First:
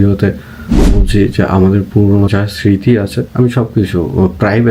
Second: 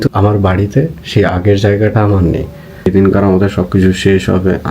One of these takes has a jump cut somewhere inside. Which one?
second; 1 cut; at 2.9 s

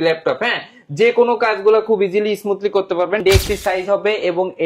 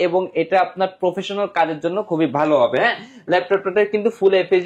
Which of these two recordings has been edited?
first; 1 cut; at 3.2 s

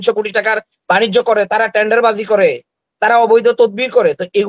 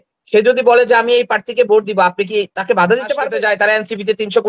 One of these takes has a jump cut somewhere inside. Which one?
second; 1 cut; at 3.2 s

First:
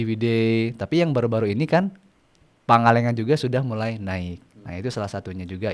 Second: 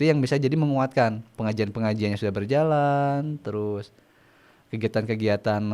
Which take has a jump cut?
second; 1 cut; at 1.3 s

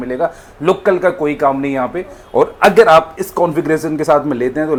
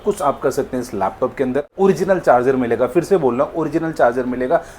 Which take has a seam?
second; 1 cut; at 1.7 s

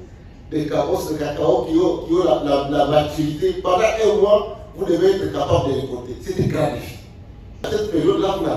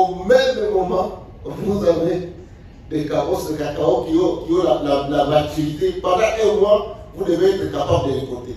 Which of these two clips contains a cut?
first; 1 cut; at 7.7 s

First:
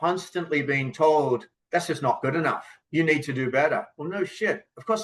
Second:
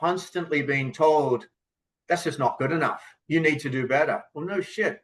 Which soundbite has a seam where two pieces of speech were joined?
first; 1 cut; at 1.5 s

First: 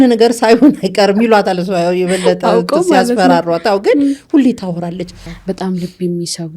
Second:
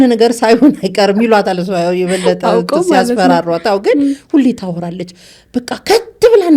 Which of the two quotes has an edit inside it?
first; 1 cut; at 5.3 s

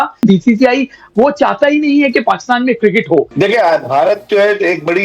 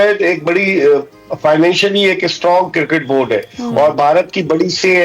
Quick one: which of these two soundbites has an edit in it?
first; 1 cut; at 3.3 s

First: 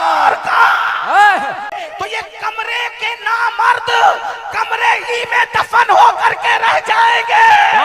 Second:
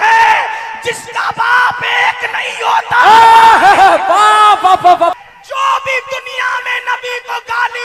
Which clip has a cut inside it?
first; 1 cut; at 1.7 s

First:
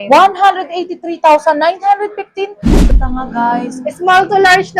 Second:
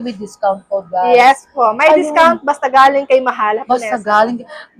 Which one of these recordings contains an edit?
first; 1 cut; at 2.9 s

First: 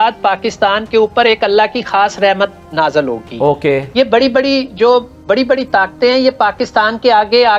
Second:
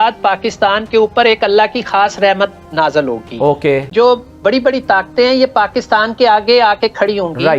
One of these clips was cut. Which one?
second; 1 cut; at 3.9 s

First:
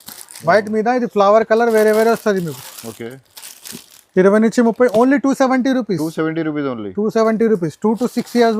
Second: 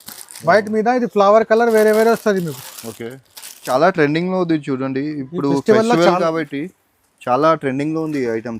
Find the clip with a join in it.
second; 1 cut; at 3.6 s

